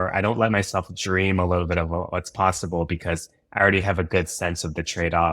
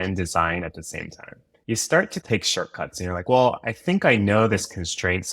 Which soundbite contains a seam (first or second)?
second